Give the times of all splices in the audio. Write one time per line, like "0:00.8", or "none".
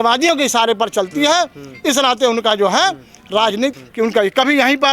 0:03.7